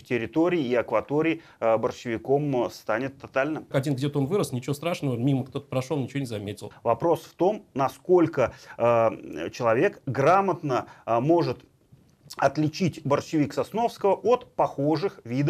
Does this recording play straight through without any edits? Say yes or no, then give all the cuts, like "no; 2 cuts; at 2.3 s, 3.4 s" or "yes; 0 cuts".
no; 2 cuts; at 3.7 s, 6.6 s